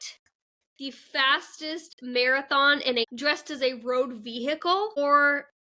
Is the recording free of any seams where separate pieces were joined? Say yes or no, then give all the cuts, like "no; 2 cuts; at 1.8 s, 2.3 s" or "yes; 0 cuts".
no; 2 cuts; at 3.0 s, 5.0 s